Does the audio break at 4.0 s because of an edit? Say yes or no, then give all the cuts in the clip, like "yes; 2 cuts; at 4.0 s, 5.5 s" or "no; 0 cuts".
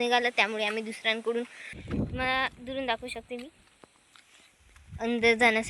no; 1 cut; at 1.8 s